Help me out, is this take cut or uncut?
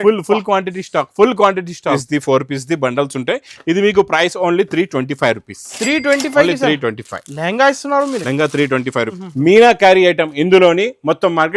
cut